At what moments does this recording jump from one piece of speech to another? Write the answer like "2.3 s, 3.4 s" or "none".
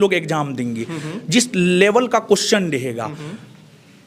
none